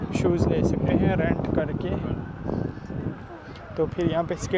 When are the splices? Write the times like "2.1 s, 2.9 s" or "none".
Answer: none